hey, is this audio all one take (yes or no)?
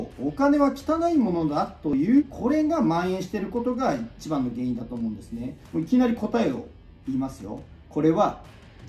no